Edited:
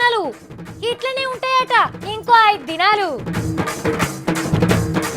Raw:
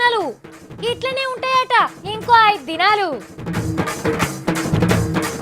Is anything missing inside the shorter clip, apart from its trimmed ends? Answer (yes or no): yes